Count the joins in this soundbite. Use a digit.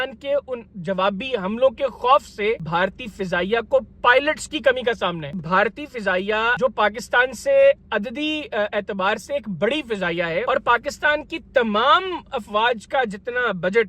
4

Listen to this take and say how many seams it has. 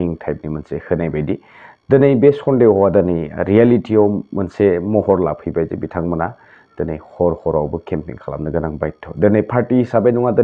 0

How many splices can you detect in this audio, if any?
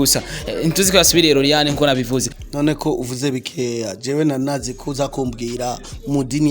1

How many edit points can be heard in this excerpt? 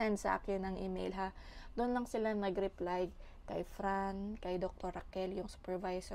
0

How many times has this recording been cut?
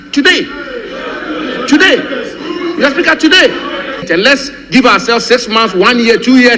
1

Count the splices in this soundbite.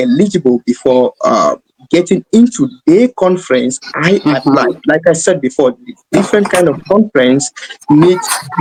0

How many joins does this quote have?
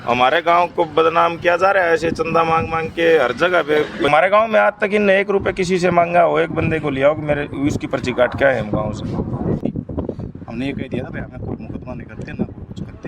2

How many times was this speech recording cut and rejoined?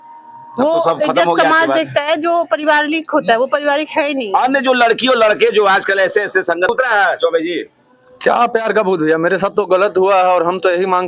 1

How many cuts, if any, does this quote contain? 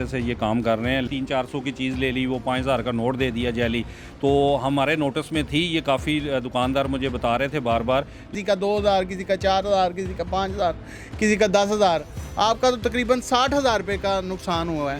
2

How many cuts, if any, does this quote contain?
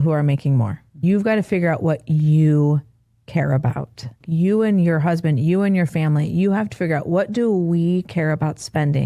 1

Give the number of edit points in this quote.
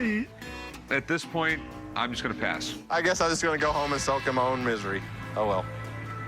1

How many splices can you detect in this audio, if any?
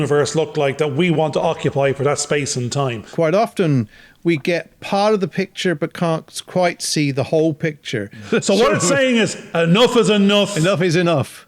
2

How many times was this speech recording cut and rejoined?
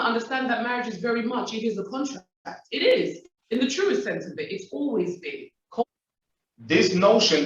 1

